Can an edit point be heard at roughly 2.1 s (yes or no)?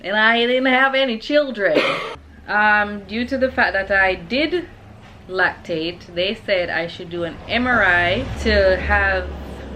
yes